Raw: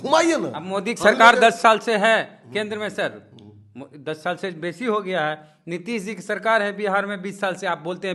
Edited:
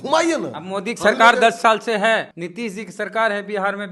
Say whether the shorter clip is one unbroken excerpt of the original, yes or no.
no